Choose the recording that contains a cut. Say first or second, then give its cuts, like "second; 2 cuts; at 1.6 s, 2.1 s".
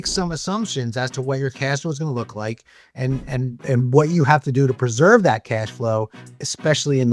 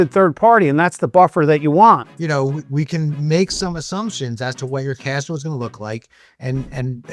second; 1 cut; at 2.1 s